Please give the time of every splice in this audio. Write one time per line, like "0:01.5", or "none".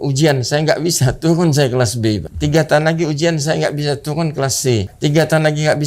0:02.3
0:04.9